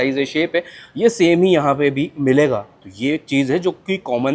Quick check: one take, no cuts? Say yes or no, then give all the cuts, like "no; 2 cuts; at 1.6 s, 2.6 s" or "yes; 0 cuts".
yes; 0 cuts